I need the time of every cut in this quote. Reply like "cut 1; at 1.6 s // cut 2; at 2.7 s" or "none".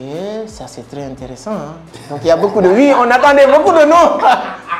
none